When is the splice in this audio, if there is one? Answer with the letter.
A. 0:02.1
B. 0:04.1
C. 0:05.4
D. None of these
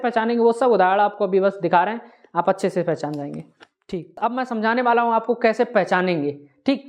B